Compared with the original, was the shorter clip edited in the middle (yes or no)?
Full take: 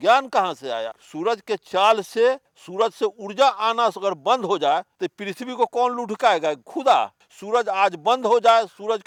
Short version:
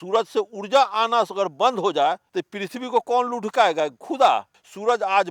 no